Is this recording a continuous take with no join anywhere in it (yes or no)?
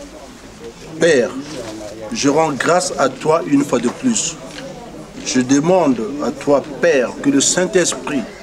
yes